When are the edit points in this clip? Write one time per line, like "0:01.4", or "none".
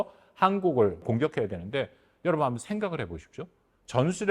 0:01.1